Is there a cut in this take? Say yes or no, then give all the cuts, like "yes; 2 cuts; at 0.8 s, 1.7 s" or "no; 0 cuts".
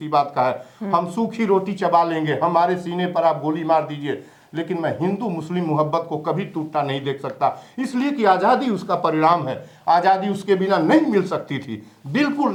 no; 0 cuts